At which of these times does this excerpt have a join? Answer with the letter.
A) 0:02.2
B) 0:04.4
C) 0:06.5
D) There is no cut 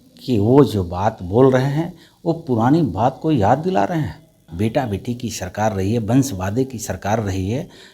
B